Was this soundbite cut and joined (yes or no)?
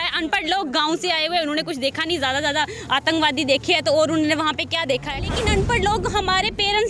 yes